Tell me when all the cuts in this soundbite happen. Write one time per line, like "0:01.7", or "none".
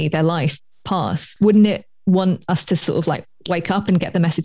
0:01.3